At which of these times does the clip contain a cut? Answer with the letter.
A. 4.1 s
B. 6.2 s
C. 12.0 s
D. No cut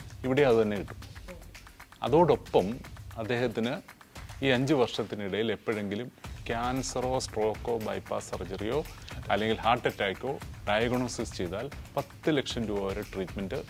D